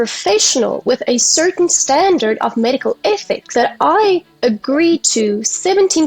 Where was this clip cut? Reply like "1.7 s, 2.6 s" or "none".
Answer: 3.4 s